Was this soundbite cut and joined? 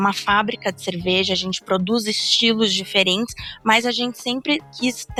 no; 0 cuts

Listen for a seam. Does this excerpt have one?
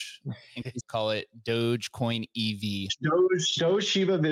yes; 2 cuts; at 0.8 s, 2.9 s

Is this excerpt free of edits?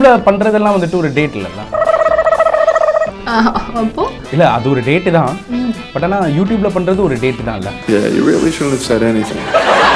yes; 0 cuts

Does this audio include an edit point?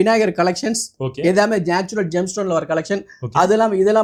no; 0 cuts

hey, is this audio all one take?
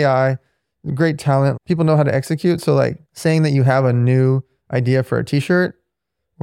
no; 2 cuts; at 1.5 s, 3.1 s

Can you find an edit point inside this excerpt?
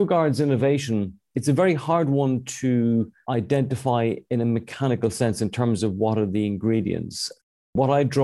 no; 0 cuts

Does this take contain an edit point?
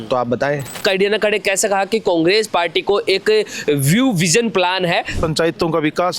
yes; 2 cuts; at 0.8 s, 5.2 s

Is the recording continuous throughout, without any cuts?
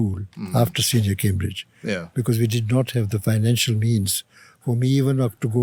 yes; 0 cuts

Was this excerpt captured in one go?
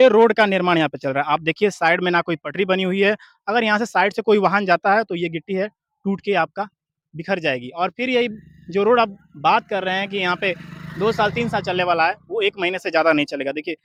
yes; 0 cuts

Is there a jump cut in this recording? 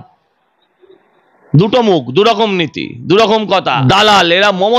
yes; 1 cut; at 3.8 s

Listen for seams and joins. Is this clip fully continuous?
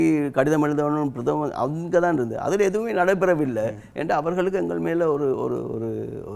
yes; 0 cuts

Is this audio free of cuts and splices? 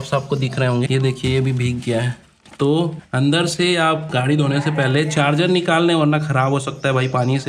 no; 2 cuts; at 0.9 s, 3.0 s

